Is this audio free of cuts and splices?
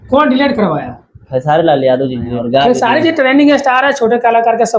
no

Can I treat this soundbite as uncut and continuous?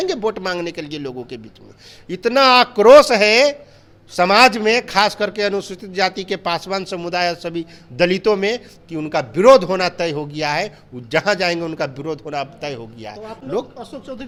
yes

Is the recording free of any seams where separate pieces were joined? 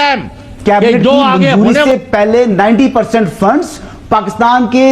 no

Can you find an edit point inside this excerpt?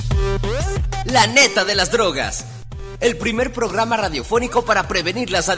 no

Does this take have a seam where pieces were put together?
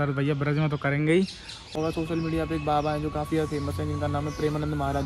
yes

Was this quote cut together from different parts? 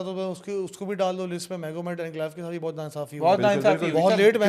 no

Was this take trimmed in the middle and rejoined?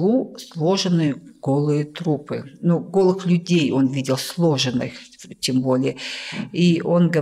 no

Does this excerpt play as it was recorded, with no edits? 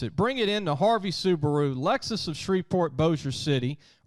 yes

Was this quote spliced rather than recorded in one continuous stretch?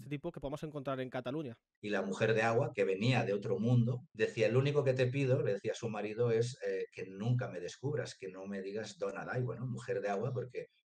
yes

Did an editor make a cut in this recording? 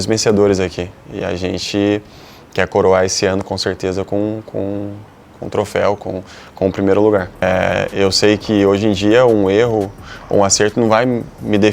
yes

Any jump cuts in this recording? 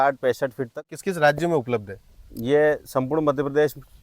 yes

